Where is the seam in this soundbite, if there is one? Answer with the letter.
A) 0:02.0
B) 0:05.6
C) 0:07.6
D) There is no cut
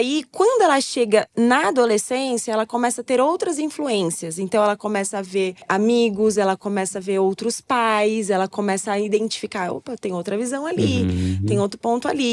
B